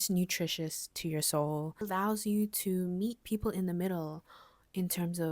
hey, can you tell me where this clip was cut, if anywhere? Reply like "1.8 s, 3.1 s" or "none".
1.8 s